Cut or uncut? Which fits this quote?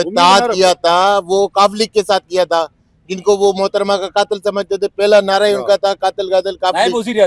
uncut